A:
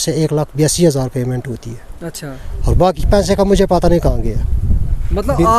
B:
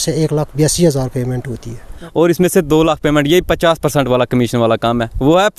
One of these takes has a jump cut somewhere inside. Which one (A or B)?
B